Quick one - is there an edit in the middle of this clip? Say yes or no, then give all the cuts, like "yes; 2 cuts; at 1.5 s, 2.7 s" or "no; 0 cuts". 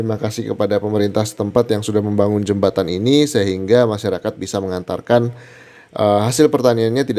no; 0 cuts